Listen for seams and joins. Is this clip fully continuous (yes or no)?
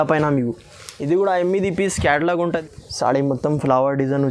no